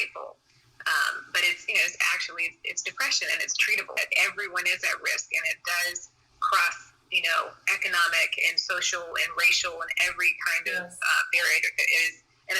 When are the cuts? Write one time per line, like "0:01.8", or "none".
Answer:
0:03.8